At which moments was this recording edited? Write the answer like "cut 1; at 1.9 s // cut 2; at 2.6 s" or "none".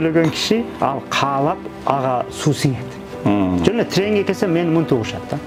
none